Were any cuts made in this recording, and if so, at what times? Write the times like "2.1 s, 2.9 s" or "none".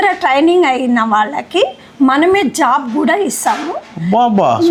none